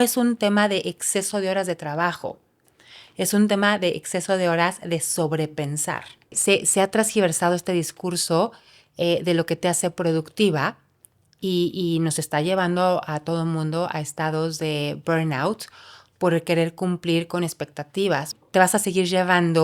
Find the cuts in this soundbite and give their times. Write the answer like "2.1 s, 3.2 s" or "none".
6.4 s, 18.4 s